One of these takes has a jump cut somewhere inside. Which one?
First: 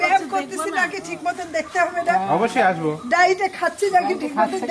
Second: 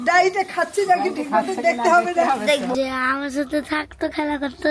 second; 1 cut; at 2.7 s

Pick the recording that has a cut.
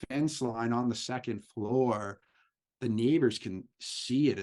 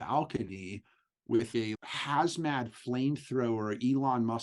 second; 1 cut; at 1.5 s

